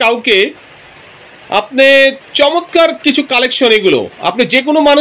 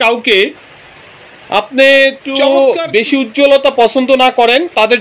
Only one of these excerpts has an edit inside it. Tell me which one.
second; 1 cut; at 2.4 s

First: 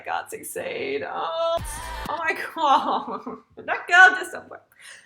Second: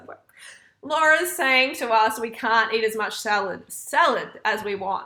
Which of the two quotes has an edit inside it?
first; 1 cut; at 1.6 s

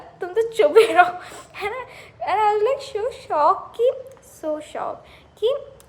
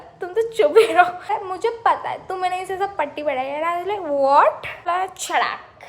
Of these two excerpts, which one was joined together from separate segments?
second; 2 cuts; at 1.3 s, 4.8 s

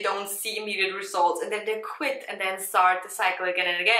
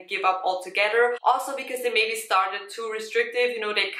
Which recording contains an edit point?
second; 1 cut; at 1.2 s

